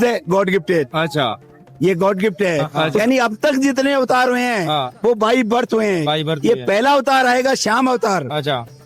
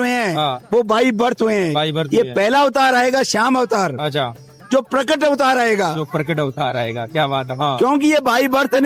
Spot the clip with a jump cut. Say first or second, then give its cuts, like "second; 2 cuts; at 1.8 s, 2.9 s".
first; 1 cut; at 3.0 s